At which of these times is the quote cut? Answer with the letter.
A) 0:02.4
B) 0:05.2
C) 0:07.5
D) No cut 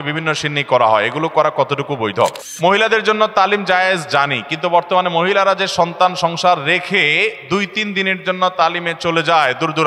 A